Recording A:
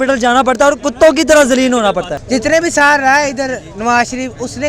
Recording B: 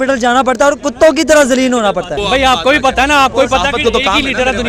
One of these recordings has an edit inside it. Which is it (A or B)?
A